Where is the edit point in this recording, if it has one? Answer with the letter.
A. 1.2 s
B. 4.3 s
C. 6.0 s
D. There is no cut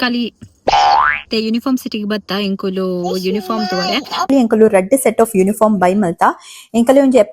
B